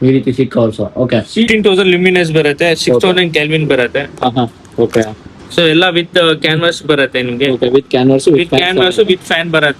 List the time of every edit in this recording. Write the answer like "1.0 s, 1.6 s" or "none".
1.5 s